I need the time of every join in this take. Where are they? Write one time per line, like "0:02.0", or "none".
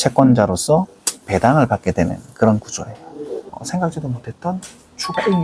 0:03.5